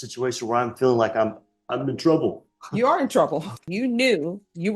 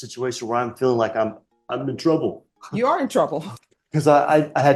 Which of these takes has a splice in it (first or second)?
first